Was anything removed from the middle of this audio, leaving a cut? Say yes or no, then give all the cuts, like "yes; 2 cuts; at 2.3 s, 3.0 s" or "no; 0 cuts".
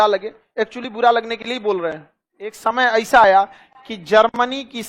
yes; 1 cut; at 2.6 s